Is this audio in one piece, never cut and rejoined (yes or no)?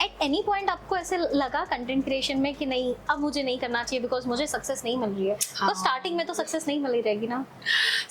yes